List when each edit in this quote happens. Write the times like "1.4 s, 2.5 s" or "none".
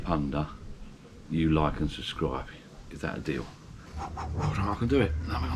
3.9 s